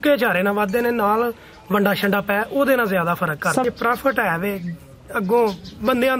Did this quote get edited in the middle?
yes; 1 cut; at 3.6 s

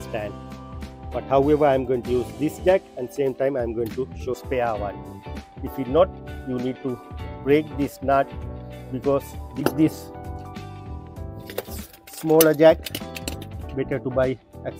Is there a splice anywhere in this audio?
yes; 2 cuts; at 4.3 s, 9.6 s

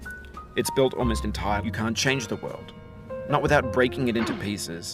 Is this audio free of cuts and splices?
no; 1 cut; at 1.6 s

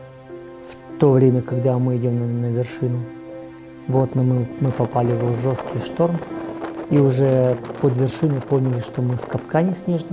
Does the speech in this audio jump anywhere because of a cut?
yes; 1 cut; at 1.0 s

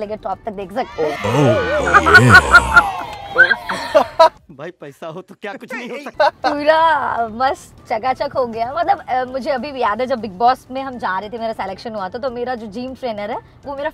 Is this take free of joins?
yes; 0 cuts

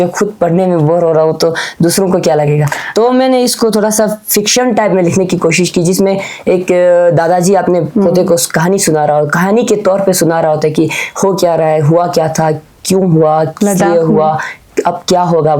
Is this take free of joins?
yes; 0 cuts

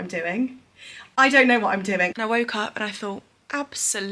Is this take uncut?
no; 1 cut; at 2.1 s

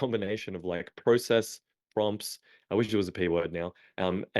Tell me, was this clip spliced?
no; 0 cuts

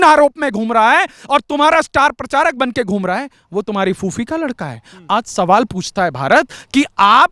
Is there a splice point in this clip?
no; 0 cuts

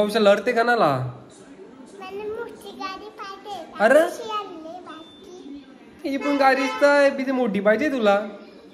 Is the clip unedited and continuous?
yes; 0 cuts

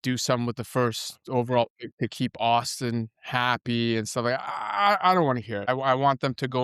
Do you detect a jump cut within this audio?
yes; 1 cut; at 5.7 s

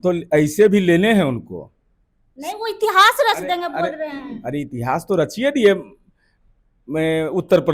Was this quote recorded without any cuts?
yes; 0 cuts

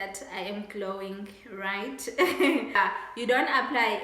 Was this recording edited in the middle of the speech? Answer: yes; 1 cut; at 2.7 s

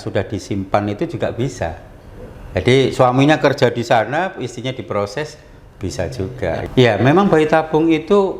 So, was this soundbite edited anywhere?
yes; 1 cut; at 6.6 s

